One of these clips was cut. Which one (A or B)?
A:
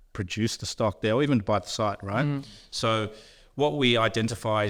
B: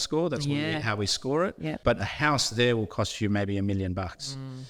B